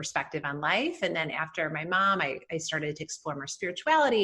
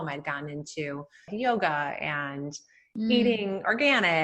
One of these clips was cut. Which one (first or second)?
second